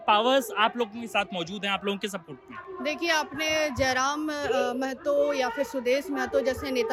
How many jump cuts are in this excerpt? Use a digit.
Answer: 0